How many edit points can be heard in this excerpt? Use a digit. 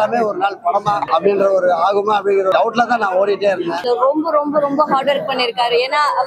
3